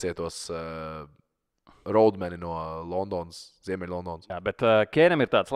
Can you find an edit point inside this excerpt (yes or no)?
yes